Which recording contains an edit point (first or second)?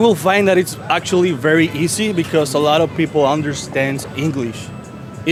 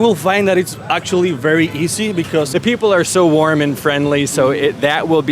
second